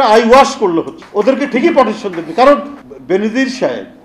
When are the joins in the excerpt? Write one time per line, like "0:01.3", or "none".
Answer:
0:01.0
0:02.8